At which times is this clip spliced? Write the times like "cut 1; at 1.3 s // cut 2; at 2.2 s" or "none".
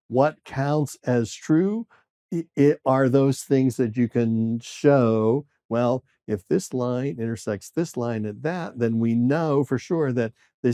none